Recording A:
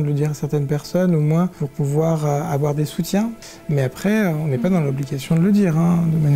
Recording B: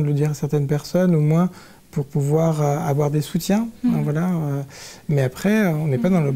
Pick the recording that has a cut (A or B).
A